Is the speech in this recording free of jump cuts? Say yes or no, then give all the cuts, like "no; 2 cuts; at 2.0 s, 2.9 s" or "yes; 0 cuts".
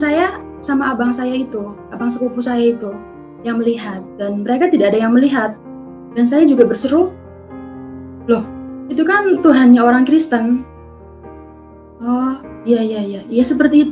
yes; 0 cuts